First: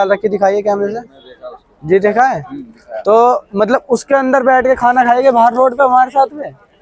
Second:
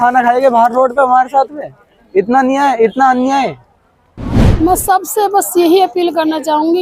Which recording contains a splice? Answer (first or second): second